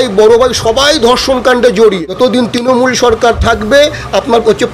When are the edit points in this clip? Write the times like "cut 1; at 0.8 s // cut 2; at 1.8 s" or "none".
cut 1; at 2.1 s